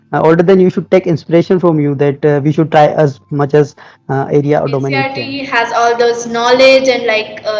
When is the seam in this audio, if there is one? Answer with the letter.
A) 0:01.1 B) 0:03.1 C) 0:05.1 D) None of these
C